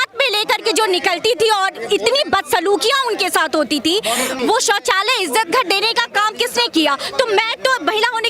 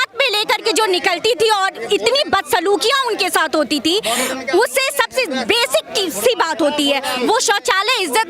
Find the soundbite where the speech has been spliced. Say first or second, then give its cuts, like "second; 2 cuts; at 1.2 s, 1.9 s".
first; 1 cut; at 4.4 s